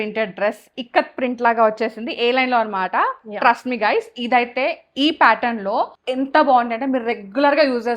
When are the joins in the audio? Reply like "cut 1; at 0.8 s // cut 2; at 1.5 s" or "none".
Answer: cut 1; at 6.0 s